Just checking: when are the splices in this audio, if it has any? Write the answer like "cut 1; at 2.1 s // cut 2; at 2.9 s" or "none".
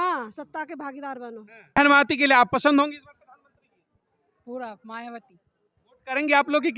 cut 1; at 1.8 s